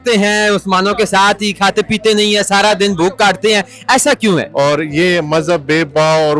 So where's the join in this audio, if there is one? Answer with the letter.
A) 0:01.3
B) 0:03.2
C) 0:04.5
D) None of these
C